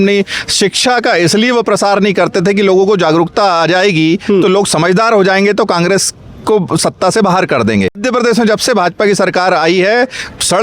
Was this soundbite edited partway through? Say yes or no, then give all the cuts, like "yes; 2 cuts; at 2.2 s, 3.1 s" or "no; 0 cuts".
yes; 1 cut; at 8.0 s